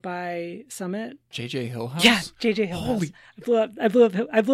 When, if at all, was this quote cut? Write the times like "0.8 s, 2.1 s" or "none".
1.3 s